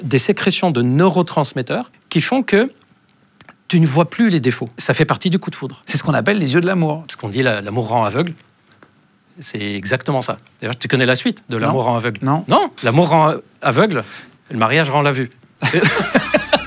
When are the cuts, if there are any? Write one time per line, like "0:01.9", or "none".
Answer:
0:02.0
0:04.8
0:07.1
0:12.8

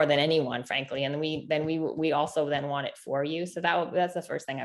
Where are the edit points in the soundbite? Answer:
none

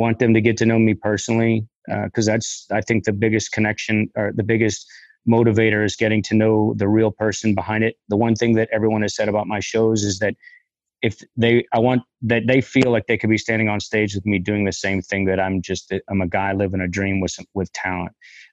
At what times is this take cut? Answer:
none

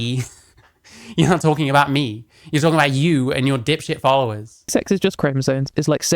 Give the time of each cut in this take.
0:04.5

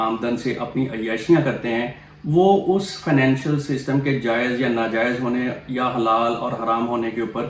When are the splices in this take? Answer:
none

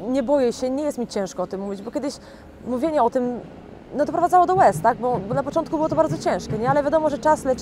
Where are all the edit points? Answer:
none

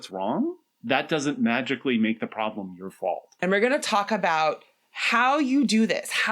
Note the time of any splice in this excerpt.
0:03.4

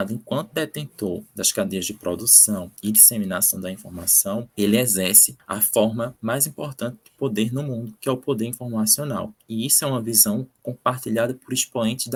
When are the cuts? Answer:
none

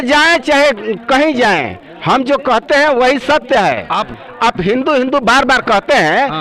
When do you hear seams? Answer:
0:04.1

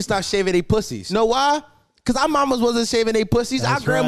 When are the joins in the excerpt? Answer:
0:01.0

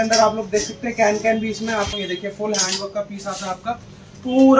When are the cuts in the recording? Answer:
0:01.9

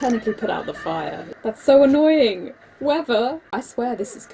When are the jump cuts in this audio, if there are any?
0:01.3
0:03.4

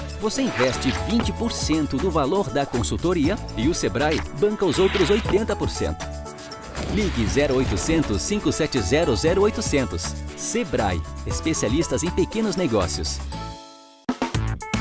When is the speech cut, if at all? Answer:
0:13.8

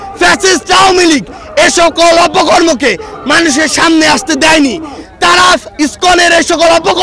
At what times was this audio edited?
none

